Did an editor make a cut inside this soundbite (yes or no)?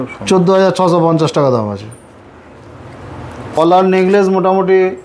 yes